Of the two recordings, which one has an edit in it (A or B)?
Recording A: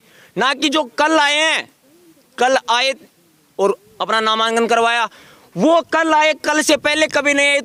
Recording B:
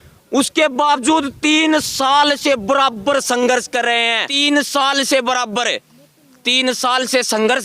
B